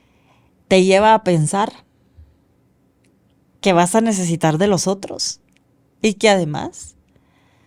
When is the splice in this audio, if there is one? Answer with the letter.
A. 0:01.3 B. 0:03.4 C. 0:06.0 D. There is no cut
D